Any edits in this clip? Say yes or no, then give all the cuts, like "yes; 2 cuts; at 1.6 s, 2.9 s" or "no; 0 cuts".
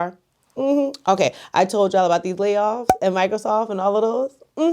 no; 0 cuts